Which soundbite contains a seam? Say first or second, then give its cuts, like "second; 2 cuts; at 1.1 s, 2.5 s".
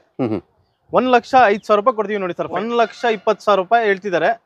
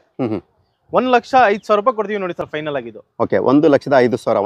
first; 1 cut; at 2.5 s